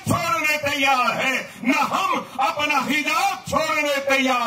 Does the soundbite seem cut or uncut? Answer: uncut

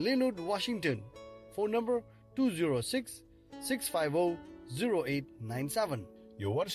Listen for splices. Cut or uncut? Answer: cut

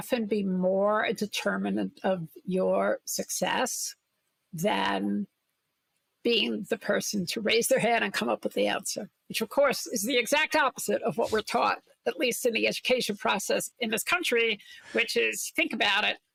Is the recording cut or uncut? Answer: uncut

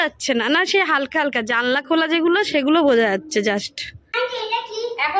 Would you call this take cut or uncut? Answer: cut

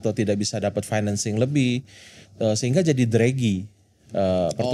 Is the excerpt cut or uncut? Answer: uncut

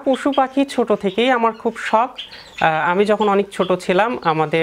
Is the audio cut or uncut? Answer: uncut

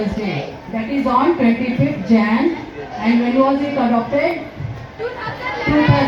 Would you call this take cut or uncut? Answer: uncut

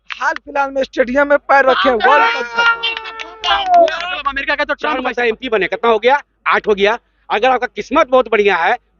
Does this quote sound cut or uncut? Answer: cut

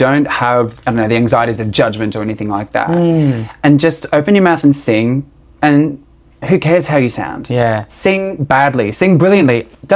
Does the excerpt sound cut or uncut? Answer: uncut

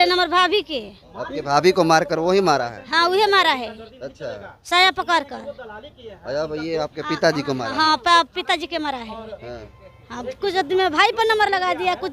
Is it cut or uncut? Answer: uncut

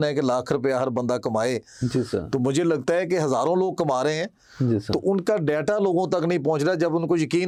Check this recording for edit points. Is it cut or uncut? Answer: uncut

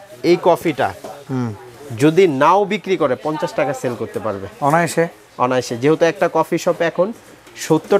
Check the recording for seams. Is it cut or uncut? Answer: uncut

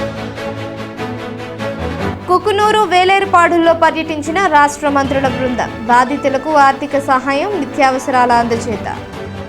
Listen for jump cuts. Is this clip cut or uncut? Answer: cut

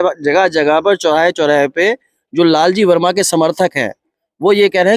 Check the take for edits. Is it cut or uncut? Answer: uncut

